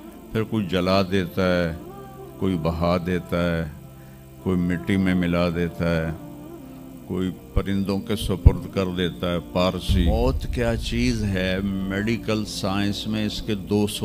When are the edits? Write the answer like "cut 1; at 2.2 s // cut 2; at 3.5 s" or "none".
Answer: cut 1; at 10.1 s